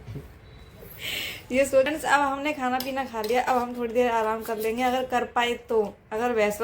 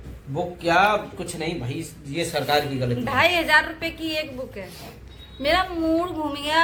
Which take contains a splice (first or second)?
first